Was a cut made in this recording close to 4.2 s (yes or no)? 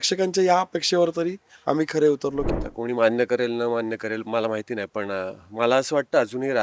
no